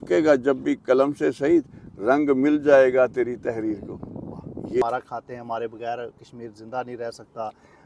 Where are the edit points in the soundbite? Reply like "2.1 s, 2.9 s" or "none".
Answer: 4.8 s